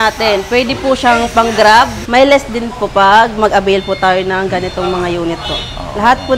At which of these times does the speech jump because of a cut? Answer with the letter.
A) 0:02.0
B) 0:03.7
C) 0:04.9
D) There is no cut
A